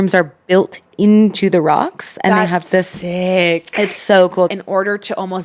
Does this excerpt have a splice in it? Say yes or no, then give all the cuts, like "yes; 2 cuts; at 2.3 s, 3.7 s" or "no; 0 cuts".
yes; 1 cut; at 4.5 s